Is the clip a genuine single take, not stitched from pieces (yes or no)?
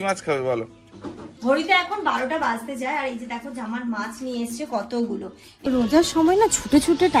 no